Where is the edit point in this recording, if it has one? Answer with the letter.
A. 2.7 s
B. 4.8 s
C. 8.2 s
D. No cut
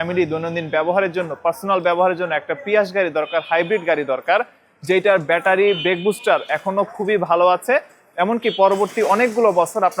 D